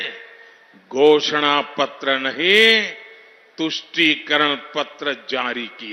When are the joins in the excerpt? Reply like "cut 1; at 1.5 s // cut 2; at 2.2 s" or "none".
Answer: none